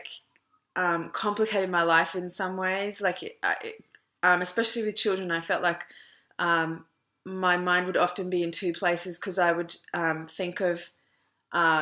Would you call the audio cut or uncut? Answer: cut